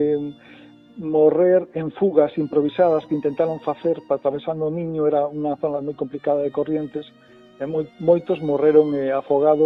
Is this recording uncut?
yes; 0 cuts

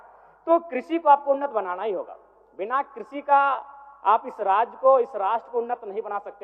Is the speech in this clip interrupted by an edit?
no; 0 cuts

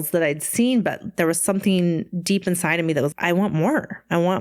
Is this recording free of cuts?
no; 1 cut; at 3.1 s

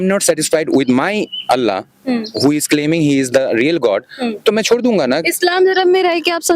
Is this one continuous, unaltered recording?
yes; 0 cuts

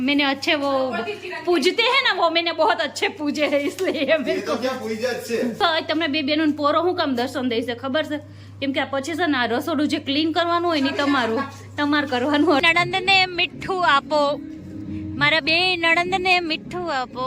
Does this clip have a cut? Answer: yes; 2 cuts; at 5.6 s, 12.6 s

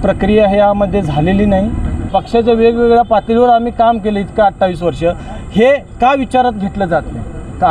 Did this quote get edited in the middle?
yes; 1 cut; at 1.9 s

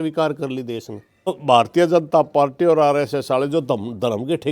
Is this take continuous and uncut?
no; 1 cut; at 1.4 s

